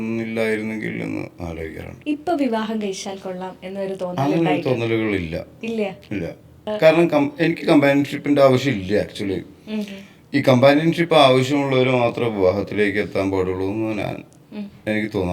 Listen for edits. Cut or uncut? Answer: cut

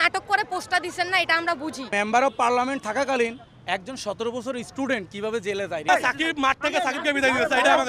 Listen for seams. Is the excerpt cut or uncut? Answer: cut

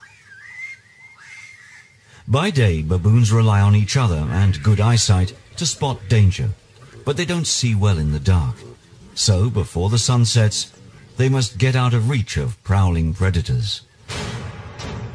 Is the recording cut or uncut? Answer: uncut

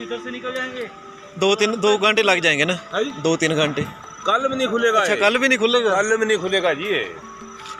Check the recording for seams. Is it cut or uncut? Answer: uncut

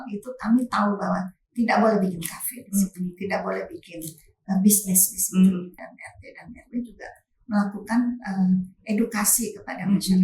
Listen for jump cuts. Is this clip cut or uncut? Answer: cut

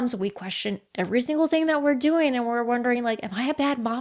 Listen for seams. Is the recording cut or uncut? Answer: uncut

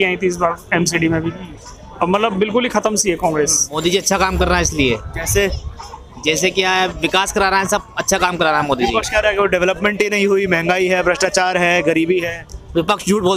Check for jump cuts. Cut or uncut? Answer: cut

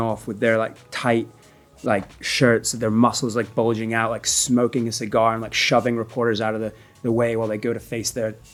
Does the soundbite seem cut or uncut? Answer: uncut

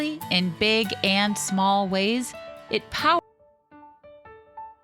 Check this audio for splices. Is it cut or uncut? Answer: cut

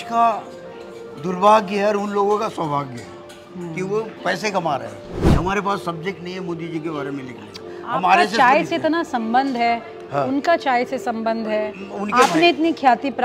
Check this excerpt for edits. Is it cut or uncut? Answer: cut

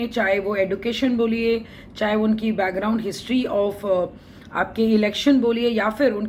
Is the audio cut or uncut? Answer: uncut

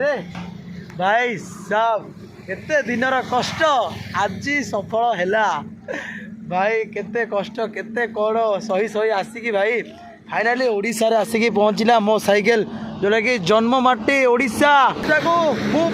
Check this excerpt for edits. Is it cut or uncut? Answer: cut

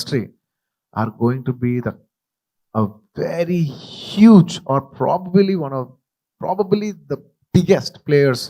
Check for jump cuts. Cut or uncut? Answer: uncut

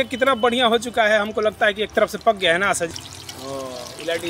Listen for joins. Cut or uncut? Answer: cut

